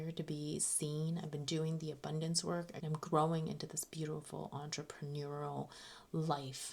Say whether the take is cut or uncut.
cut